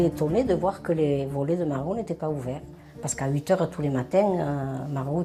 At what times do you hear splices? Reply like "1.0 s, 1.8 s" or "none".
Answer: none